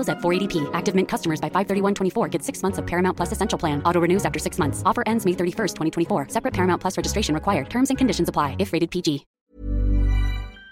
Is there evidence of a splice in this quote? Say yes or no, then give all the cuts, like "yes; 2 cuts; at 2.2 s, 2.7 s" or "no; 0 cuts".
yes; 1 cut; at 9.3 s